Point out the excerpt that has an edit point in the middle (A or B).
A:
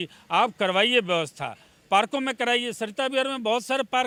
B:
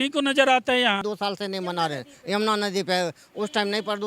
B